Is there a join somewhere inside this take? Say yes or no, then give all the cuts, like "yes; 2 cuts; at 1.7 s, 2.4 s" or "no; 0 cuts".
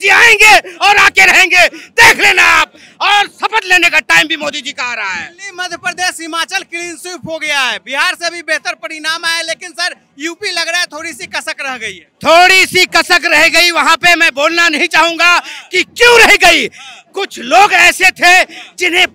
no; 0 cuts